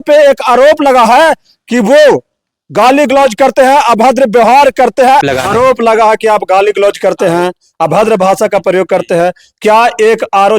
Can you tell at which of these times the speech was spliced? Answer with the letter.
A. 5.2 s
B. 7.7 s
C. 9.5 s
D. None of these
A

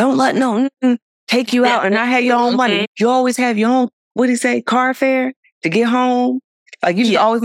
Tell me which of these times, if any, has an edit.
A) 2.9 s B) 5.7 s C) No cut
A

